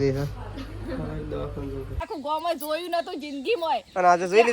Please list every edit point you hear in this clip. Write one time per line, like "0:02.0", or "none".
0:02.1